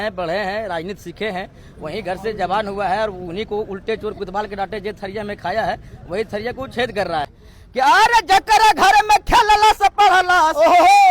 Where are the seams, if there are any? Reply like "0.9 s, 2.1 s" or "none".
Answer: 7.3 s